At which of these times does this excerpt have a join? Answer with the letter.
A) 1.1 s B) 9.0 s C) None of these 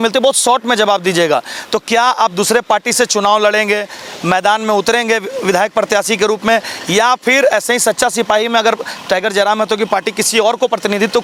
C